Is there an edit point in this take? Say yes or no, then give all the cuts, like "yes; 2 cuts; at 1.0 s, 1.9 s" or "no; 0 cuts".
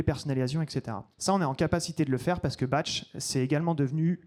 no; 0 cuts